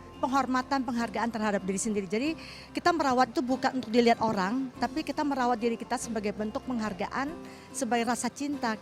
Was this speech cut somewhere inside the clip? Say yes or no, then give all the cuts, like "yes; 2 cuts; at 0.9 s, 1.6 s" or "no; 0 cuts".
no; 0 cuts